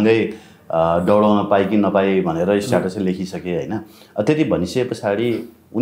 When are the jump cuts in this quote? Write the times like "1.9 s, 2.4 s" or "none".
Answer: none